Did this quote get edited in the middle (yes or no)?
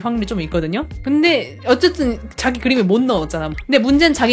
yes